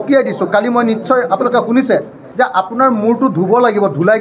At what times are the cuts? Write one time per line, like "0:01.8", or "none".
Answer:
0:02.2